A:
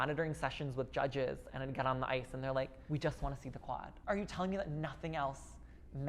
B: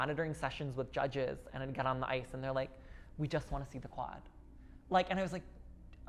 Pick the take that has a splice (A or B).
A